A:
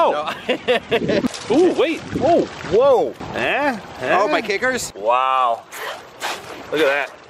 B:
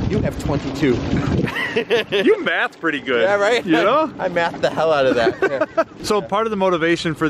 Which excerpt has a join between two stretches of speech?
A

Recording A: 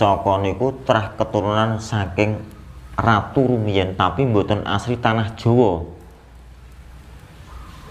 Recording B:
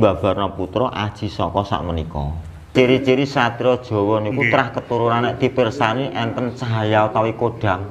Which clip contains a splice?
B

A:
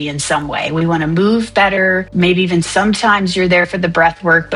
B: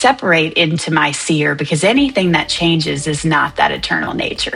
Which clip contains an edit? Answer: A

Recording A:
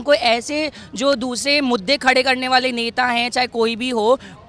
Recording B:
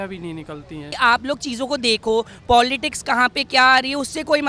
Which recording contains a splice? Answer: B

